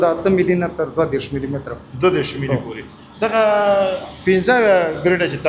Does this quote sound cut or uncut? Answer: uncut